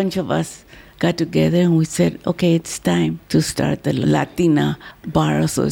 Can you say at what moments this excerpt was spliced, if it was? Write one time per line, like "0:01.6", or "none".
0:03.2